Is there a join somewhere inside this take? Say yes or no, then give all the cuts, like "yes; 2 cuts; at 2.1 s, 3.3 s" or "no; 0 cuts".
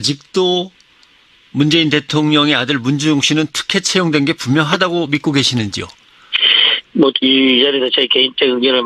yes; 1 cut; at 3.2 s